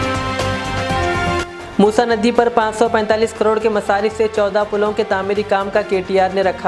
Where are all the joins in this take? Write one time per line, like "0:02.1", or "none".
0:01.2